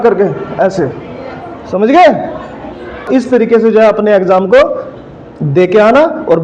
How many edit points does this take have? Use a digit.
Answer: 1